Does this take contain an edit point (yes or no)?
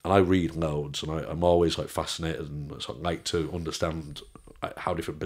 no